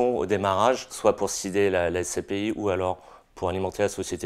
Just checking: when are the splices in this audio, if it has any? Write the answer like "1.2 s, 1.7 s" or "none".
0.9 s